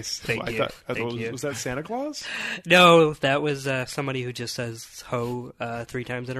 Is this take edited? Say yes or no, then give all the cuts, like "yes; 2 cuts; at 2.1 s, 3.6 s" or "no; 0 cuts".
no; 0 cuts